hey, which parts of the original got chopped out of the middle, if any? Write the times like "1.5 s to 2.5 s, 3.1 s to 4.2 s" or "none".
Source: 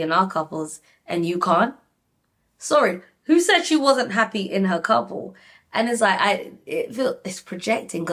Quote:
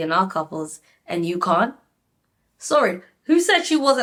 none